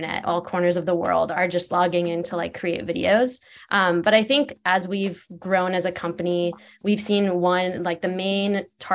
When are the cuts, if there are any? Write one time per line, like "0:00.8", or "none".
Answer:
0:01.3

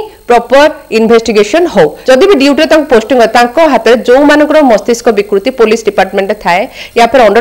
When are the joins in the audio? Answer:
0:02.0

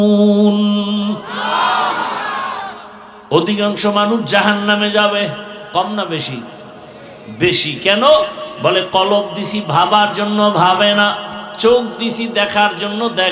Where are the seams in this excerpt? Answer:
none

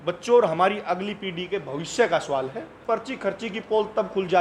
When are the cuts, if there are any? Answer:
0:02.8

